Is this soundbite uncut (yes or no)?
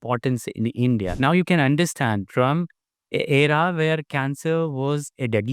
no